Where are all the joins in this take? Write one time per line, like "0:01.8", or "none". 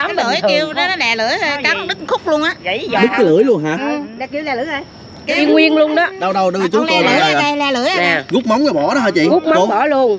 0:05.4